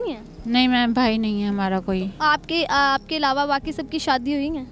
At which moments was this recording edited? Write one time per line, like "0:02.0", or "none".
none

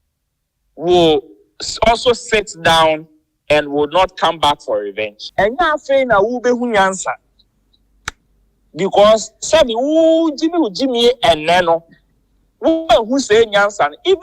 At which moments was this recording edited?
0:05.2

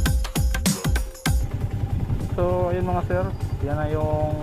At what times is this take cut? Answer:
0:01.4

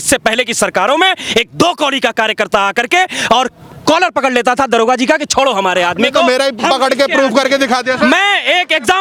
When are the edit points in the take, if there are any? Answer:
none

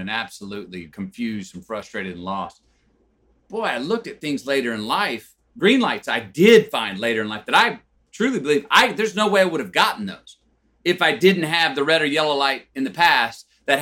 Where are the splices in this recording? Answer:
0:05.5

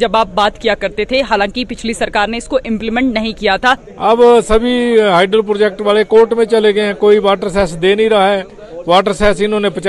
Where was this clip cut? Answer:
0:03.9

